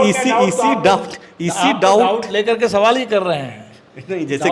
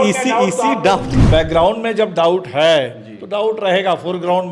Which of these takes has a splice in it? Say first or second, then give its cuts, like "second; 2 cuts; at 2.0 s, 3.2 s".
second; 1 cut; at 1.2 s